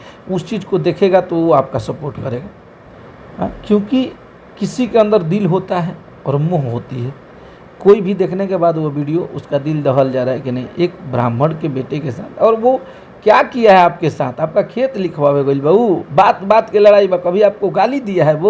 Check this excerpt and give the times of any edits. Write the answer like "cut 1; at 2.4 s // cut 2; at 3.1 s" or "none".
none